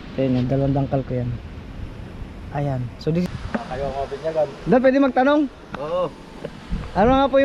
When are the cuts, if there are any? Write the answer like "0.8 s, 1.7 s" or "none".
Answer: 3.3 s